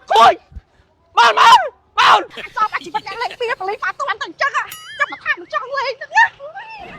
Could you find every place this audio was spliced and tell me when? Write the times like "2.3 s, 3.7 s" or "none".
2.4 s